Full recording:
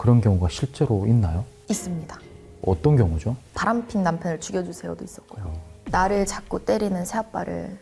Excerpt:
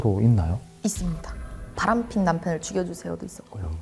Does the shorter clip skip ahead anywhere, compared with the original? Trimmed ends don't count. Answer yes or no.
yes